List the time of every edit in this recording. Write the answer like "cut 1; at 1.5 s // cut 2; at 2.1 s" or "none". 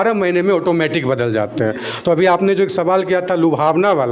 none